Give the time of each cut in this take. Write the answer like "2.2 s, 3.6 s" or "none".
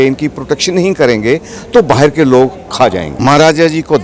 3.1 s